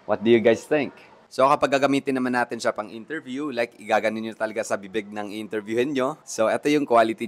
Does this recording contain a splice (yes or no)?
yes